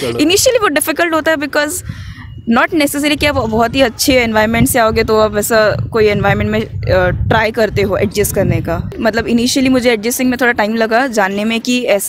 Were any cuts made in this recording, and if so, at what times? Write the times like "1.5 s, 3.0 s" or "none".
9.0 s